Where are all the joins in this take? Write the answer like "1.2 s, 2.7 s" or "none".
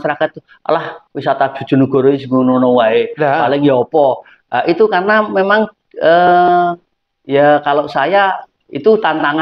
none